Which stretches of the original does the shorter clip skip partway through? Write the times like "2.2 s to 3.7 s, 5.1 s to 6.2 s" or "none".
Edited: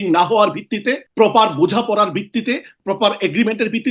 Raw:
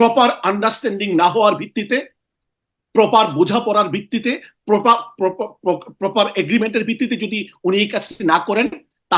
2.1 s to 2.8 s, 4.5 s to 5.9 s